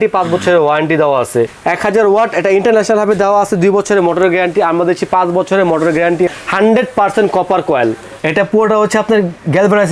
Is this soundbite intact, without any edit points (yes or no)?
no